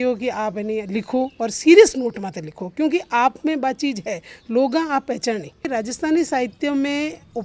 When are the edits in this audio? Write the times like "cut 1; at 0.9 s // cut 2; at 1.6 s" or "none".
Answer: cut 1; at 5.6 s